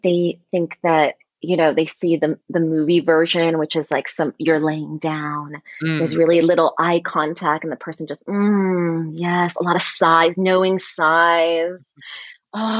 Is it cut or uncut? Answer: cut